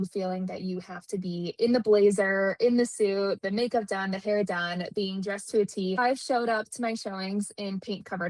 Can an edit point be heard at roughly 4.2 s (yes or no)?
no